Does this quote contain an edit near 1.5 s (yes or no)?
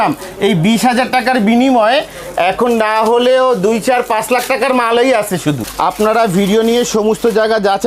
no